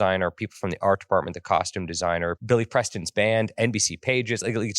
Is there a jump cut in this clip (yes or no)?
yes